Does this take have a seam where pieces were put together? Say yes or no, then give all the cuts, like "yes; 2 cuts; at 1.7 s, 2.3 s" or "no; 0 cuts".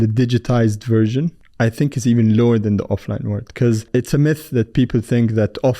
yes; 2 cuts; at 1.4 s, 3.8 s